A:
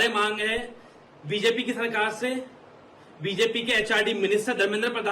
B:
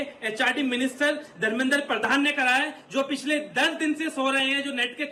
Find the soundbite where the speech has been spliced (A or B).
A